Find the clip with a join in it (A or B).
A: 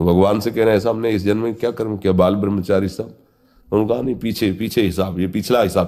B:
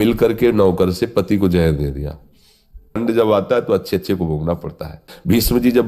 B